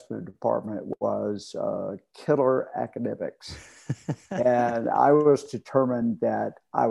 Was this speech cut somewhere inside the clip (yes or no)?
no